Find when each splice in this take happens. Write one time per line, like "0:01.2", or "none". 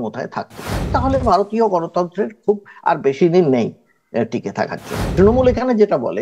0:01.0
0:05.0